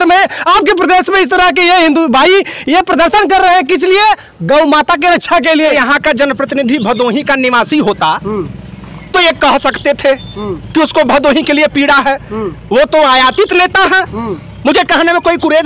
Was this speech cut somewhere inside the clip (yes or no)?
yes